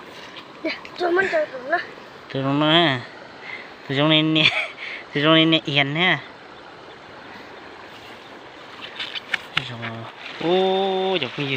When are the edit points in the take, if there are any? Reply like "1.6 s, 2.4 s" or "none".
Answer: 10.2 s